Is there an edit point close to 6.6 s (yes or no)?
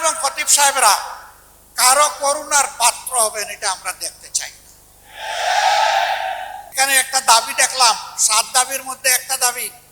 yes